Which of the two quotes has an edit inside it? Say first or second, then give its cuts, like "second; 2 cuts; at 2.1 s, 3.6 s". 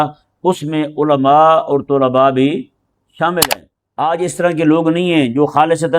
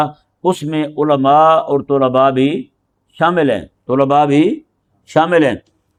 first; 1 cut; at 3.4 s